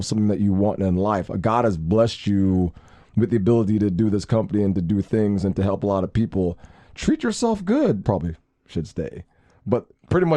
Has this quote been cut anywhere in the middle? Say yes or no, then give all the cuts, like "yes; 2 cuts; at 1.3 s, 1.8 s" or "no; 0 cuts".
yes; 1 cut; at 8.0 s